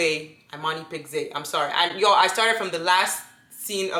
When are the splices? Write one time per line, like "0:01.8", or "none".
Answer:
none